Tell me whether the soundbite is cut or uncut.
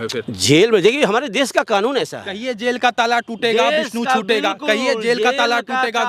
uncut